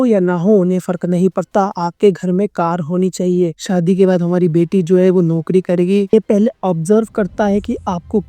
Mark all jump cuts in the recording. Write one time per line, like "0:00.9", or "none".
0:03.5
0:06.1